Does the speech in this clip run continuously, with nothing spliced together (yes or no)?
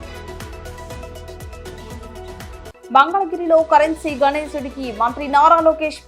no